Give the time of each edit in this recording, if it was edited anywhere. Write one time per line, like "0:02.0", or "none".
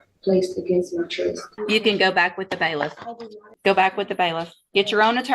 0:01.5
0:03.5